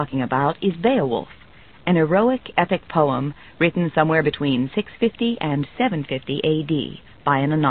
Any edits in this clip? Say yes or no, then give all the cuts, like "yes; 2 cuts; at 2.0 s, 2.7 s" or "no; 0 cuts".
yes; 1 cut; at 5.8 s